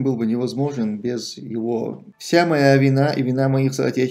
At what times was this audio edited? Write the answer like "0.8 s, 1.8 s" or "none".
2.1 s